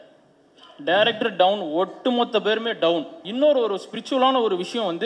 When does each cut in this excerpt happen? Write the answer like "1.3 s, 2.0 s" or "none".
3.2 s